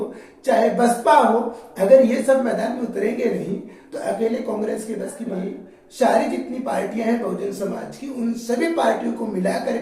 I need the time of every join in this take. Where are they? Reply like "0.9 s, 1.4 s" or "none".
5.3 s